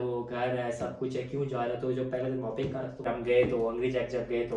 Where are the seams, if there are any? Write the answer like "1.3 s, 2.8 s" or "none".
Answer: 3.0 s